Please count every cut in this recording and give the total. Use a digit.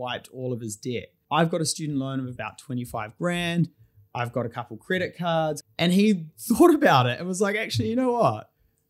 2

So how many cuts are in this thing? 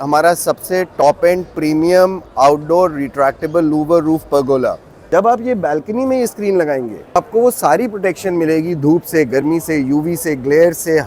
2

